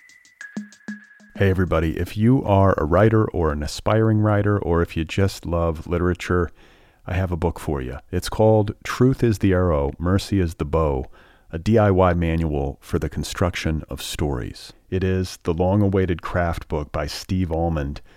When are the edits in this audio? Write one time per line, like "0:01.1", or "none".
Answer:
0:01.0